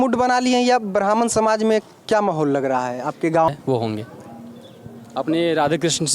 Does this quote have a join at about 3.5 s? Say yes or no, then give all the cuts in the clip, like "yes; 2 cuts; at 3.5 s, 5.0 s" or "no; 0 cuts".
yes; 1 cut; at 3.5 s